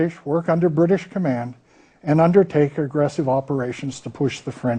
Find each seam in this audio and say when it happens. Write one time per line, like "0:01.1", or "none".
0:01.1